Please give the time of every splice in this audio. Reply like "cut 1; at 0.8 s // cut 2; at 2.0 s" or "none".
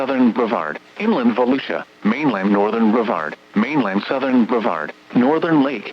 cut 1; at 1.3 s